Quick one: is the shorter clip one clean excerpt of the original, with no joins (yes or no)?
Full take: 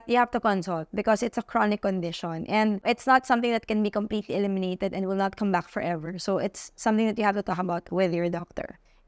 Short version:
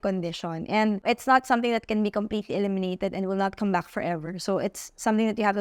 yes